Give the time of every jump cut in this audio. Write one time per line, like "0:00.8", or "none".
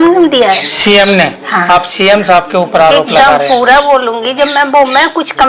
none